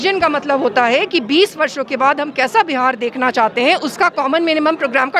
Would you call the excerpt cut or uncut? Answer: uncut